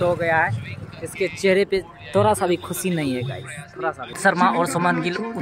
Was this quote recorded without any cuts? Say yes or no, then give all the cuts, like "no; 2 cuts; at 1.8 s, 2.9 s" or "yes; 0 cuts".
no; 1 cut; at 4.2 s